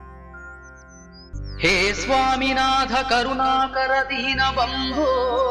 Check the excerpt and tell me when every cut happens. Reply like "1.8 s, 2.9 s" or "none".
1.1 s